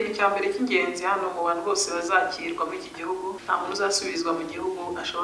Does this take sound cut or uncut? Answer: cut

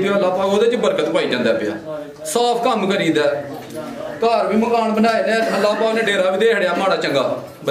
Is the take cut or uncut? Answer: uncut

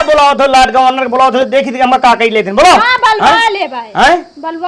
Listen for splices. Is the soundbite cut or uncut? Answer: uncut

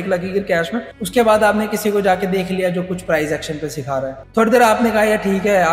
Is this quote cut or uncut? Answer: cut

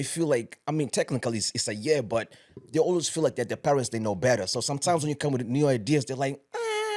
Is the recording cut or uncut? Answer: uncut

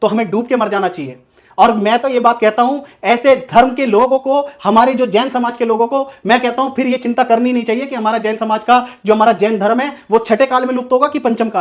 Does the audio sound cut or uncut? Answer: uncut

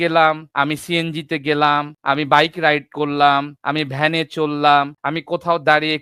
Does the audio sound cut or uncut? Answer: uncut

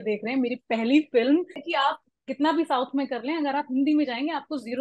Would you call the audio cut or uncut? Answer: cut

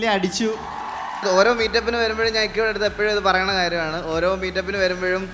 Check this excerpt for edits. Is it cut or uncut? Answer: cut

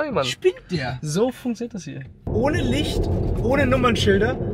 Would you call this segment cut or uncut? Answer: cut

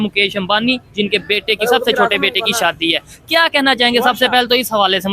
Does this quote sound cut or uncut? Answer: uncut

